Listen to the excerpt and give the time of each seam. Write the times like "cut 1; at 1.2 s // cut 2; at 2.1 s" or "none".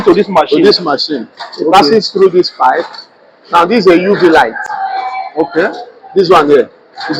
none